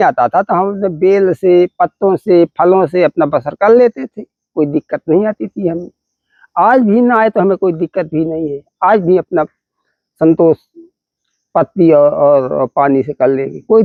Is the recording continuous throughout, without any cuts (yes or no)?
yes